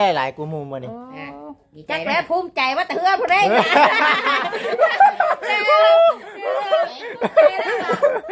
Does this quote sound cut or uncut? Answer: uncut